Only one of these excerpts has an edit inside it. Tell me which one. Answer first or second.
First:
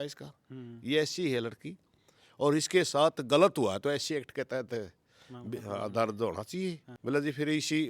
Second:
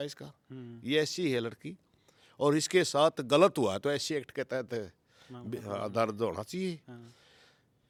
first